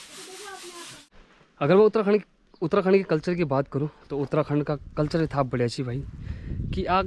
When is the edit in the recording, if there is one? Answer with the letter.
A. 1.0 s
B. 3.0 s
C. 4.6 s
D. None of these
A